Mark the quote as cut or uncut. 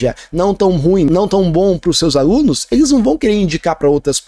cut